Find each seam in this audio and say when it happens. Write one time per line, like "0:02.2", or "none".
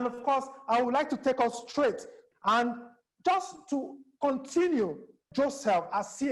0:02.2
0:05.2